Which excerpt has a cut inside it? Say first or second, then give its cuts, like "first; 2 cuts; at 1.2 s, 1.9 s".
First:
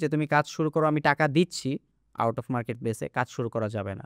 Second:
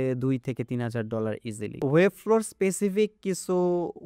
second; 1 cut; at 1.8 s